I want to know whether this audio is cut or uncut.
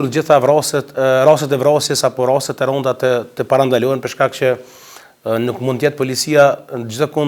uncut